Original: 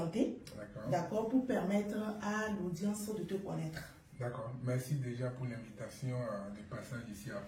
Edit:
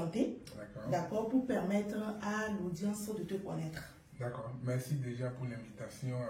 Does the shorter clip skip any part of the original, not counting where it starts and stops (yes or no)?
no